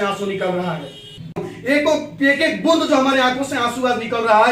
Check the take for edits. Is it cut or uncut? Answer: cut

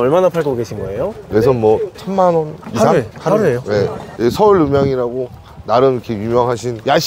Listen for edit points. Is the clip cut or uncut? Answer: cut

